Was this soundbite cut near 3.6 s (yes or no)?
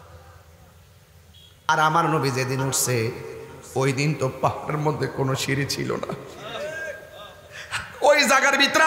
no